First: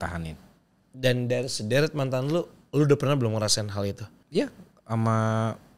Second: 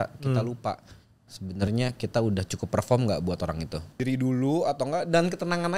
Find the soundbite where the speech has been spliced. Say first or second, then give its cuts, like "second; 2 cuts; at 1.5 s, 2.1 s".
second; 1 cut; at 4.0 s